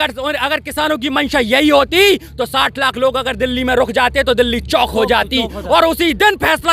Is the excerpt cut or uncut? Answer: uncut